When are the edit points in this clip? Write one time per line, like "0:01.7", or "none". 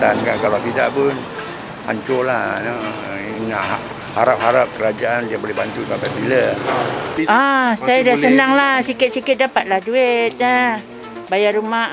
0:07.2

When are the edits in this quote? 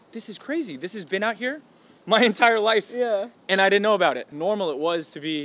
0:04.3

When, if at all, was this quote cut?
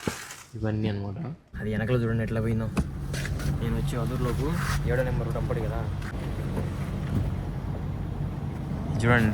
0:01.5
0:06.2

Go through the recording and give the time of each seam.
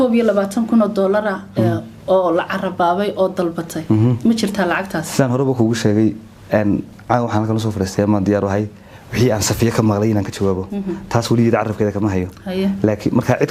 none

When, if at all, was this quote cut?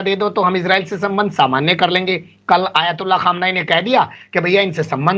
none

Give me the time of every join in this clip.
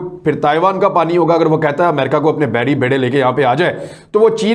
none

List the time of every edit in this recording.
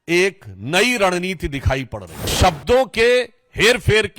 0:02.3

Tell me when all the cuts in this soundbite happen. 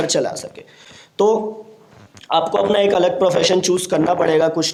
none

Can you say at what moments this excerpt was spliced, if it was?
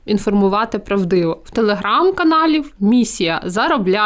none

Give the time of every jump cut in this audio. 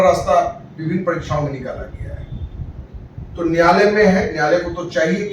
none

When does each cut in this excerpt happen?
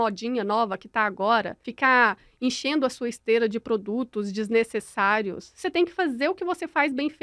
0:01.6

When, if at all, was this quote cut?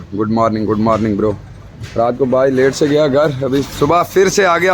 none

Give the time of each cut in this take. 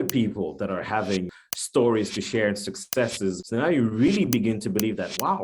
0:01.3
0:03.4

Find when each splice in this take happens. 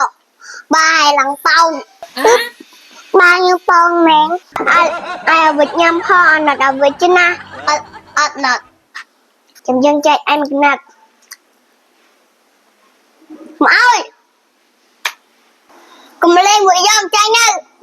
0:04.5

